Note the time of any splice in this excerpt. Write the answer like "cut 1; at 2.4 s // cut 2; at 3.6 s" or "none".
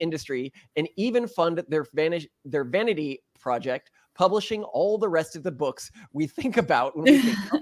none